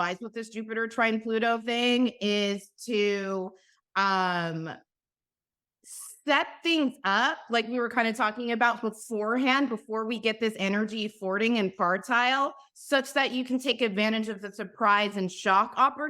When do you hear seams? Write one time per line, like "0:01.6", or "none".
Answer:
none